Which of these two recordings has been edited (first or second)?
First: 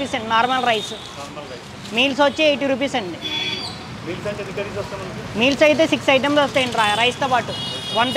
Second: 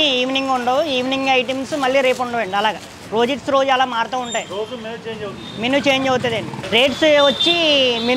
second